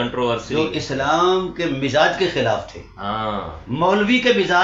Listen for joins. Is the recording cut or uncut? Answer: uncut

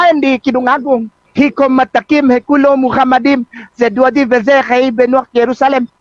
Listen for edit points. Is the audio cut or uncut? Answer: cut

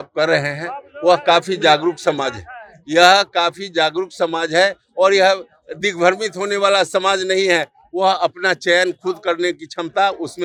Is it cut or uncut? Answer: uncut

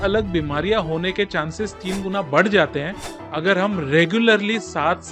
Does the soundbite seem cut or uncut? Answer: uncut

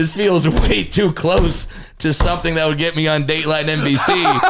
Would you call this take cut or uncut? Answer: uncut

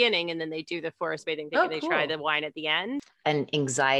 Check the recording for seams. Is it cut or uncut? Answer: cut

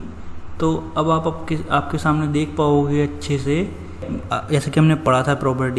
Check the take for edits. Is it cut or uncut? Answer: cut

